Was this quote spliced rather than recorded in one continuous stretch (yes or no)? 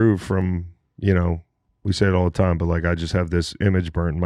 no